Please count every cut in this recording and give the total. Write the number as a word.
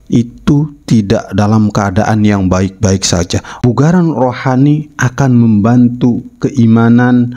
one